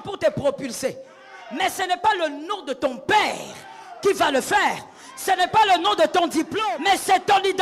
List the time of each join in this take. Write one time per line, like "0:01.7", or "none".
0:06.5